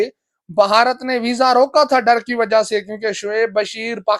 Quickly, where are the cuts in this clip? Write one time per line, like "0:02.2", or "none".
none